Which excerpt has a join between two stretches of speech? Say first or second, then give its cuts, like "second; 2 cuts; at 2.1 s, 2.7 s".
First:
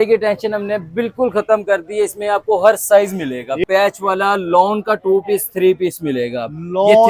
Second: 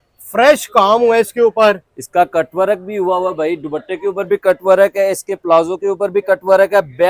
first; 1 cut; at 3.6 s